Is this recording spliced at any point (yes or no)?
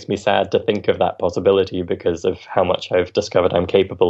no